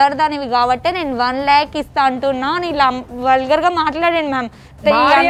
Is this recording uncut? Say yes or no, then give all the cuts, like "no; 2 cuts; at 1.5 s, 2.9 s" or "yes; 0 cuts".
yes; 0 cuts